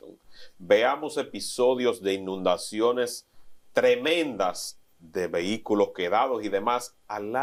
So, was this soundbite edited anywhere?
no; 0 cuts

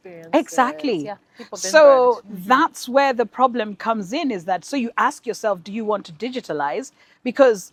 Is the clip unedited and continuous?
yes; 0 cuts

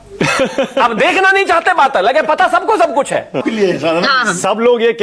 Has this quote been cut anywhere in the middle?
yes; 1 cut; at 3.4 s

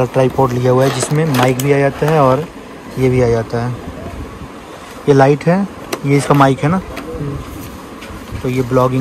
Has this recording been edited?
no; 0 cuts

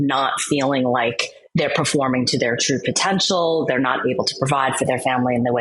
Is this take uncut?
yes; 0 cuts

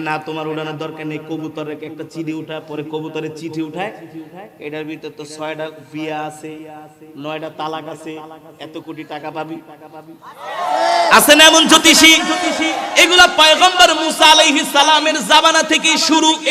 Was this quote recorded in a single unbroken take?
yes; 0 cuts

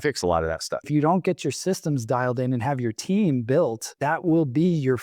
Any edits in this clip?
yes; 2 cuts; at 0.9 s, 3.9 s

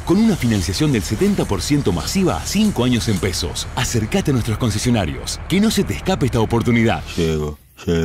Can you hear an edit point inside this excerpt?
no; 0 cuts

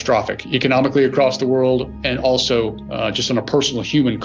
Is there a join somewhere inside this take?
no; 0 cuts

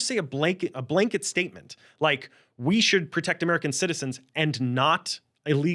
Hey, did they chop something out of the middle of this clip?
no; 0 cuts

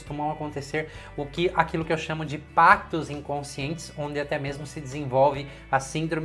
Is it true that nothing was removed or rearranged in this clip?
yes; 0 cuts

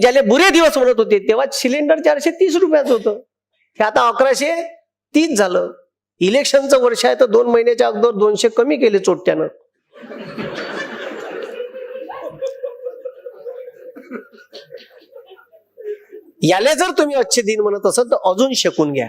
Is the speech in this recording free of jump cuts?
yes; 0 cuts

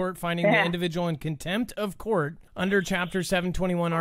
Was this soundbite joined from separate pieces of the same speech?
yes; 1 cut; at 2.4 s

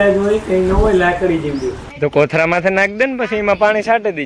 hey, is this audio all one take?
no; 1 cut; at 1.8 s

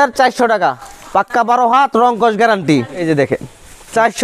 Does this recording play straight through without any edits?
no; 1 cut; at 3.0 s

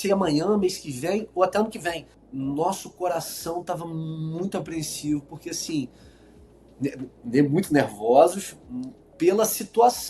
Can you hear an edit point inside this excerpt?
yes; 1 cut; at 2.1 s

